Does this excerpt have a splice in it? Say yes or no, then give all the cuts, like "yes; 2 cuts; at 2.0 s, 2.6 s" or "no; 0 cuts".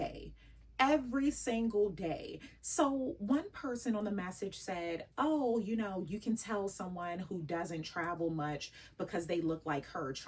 no; 0 cuts